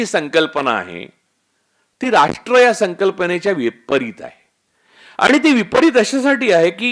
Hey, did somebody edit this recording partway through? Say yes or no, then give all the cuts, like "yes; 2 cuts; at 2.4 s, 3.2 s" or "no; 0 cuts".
no; 0 cuts